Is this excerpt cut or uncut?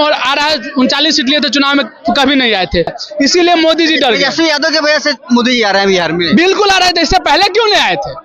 cut